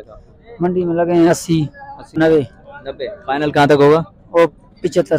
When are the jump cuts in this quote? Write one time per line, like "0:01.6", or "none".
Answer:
0:02.2